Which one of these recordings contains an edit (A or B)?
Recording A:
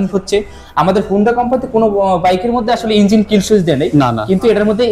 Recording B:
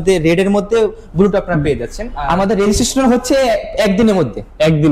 B